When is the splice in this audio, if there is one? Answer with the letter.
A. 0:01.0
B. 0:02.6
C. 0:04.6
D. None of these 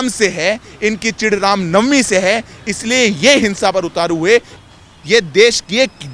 C